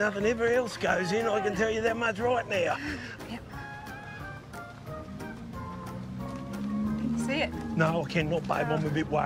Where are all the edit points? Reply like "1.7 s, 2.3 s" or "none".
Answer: none